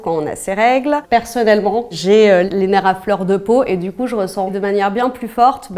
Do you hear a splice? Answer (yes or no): yes